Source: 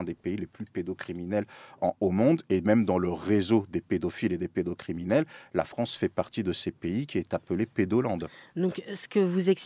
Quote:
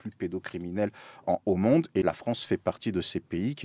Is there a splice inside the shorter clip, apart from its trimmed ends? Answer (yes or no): yes